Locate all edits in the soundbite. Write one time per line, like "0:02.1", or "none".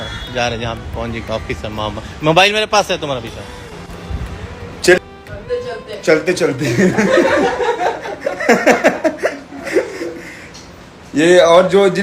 0:05.0